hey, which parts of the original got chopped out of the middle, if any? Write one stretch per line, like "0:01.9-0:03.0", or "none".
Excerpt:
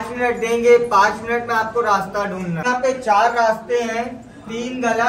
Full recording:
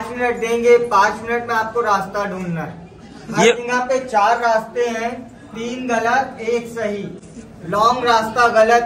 0:02.6-0:03.7